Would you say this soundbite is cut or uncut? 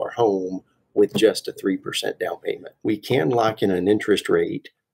cut